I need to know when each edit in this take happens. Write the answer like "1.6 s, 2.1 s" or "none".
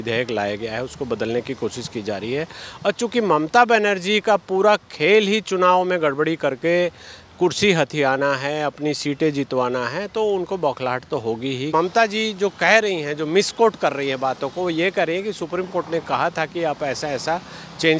11.7 s